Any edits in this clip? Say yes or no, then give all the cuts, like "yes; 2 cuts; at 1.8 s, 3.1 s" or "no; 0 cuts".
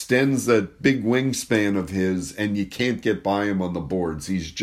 no; 0 cuts